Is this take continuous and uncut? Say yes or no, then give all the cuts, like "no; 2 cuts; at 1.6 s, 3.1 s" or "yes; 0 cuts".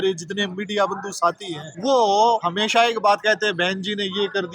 no; 2 cuts; at 1.7 s, 2.5 s